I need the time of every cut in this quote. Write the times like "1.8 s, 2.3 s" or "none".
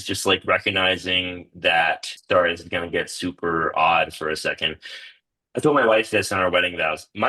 2.1 s